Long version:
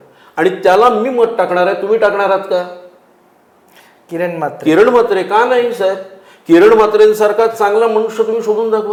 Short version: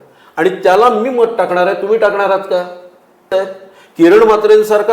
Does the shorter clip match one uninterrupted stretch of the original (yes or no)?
no